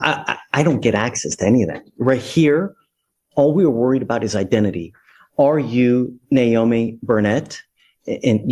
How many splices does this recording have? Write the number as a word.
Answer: zero